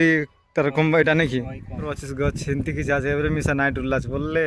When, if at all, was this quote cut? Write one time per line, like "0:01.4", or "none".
0:01.9